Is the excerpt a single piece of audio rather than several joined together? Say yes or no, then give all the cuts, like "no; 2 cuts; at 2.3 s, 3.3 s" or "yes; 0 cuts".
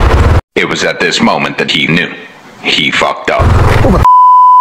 yes; 0 cuts